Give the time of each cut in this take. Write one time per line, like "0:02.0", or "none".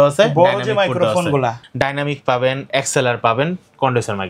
0:01.6